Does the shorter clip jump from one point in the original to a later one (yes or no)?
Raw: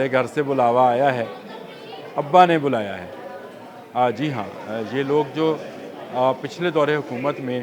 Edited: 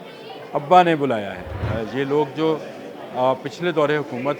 yes